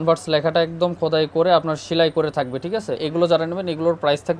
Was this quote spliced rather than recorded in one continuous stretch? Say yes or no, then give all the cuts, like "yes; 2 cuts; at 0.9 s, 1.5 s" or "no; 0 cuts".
yes; 1 cut; at 3.0 s